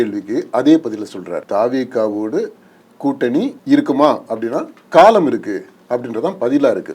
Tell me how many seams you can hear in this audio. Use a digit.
2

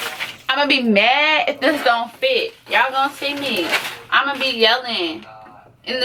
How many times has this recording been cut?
0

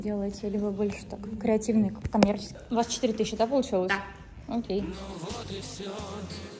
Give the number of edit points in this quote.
2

